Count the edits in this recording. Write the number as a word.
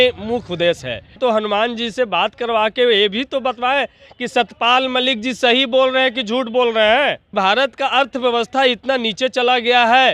two